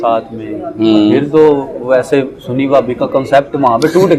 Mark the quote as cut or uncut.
uncut